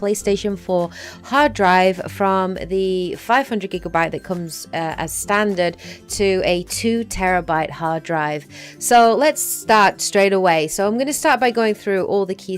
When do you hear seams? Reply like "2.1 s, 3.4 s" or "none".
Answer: 2.7 s